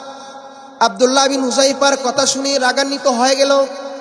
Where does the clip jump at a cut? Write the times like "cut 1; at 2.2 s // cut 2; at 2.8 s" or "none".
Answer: none